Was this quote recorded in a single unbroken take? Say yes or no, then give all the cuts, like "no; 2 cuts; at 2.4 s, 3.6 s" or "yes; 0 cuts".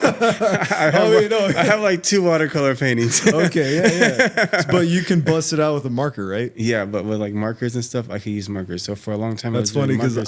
yes; 0 cuts